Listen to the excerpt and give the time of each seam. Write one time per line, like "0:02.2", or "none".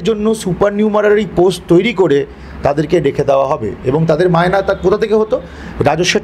none

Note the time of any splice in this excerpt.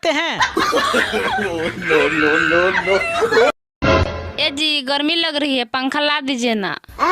0:03.7

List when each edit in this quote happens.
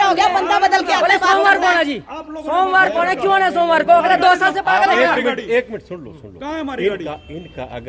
none

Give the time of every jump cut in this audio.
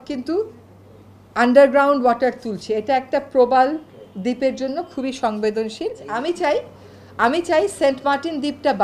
0:06.0

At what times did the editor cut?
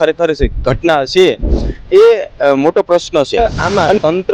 0:03.4

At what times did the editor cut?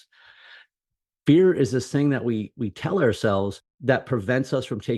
0:03.7

